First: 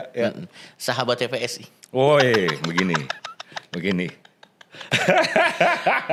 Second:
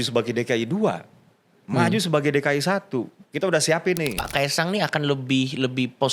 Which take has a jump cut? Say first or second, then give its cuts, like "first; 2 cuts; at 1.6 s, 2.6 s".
second; 1 cut; at 4.2 s